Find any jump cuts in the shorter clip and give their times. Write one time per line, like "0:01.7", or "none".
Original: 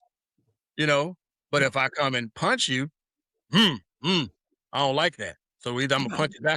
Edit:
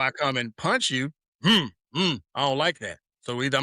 0:01.2
0:02.3